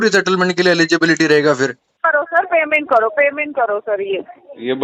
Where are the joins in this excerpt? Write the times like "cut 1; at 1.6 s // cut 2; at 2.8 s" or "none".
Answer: cut 1; at 1.9 s